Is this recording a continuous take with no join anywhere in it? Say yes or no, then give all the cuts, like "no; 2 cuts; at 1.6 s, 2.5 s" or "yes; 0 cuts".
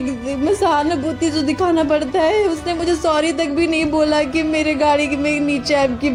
yes; 0 cuts